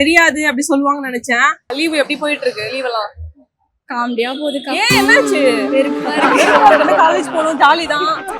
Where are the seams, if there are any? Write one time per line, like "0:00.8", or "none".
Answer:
0:01.7